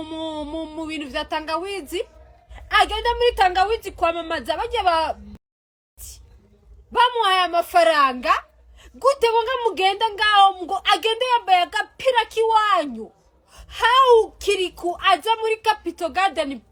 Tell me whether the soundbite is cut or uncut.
uncut